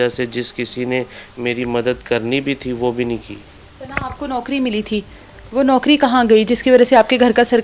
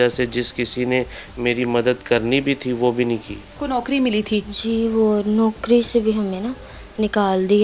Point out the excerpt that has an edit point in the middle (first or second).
second